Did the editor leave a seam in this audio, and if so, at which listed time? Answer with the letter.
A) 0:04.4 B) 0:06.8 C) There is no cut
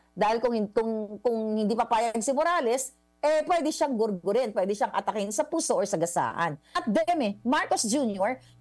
B